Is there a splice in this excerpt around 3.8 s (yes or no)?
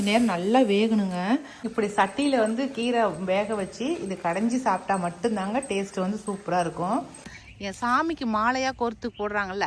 no